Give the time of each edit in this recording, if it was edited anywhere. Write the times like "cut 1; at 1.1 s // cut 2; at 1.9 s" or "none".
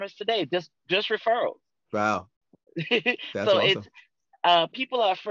none